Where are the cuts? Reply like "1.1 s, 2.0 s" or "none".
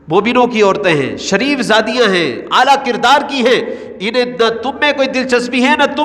none